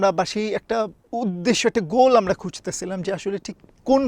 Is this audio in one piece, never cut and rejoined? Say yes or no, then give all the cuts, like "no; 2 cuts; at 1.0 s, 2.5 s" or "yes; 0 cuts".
no; 1 cut; at 1.0 s